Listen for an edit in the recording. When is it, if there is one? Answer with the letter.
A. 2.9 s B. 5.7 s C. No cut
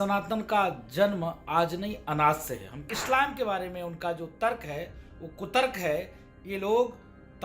A